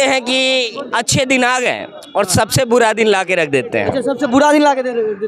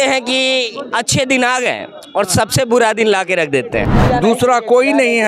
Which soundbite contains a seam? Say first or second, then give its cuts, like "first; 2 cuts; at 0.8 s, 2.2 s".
second; 1 cut; at 3.9 s